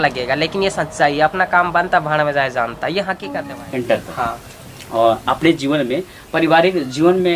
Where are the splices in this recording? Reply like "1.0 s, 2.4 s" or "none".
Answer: 3.3 s